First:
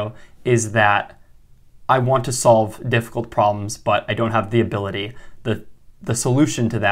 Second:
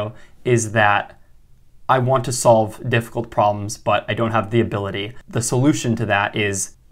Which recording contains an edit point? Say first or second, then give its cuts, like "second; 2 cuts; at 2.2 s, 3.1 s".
second; 1 cut; at 5.1 s